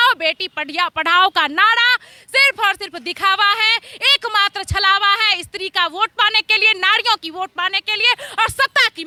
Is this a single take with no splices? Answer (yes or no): yes